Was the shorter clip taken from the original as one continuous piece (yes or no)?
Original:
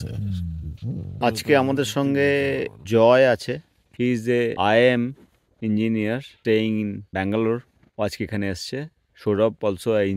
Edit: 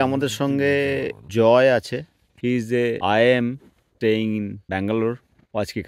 no